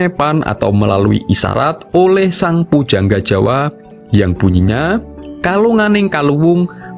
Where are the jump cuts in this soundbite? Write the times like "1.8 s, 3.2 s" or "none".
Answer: 3.9 s